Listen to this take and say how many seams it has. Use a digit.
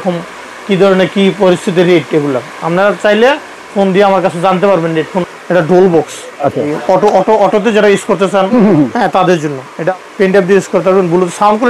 3